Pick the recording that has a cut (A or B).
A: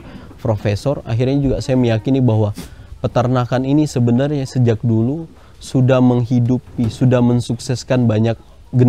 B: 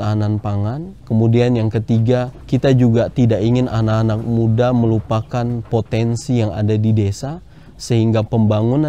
B